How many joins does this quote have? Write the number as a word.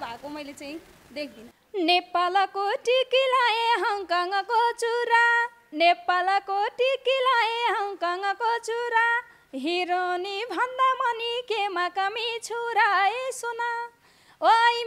one